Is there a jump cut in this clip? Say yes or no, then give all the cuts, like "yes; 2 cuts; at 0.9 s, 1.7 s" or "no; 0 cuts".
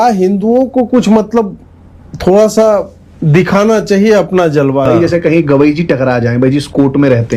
yes; 1 cut; at 4.9 s